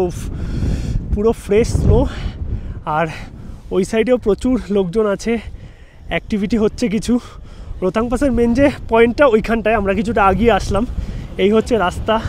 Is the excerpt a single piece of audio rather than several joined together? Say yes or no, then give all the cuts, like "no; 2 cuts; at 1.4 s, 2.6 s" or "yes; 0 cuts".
yes; 0 cuts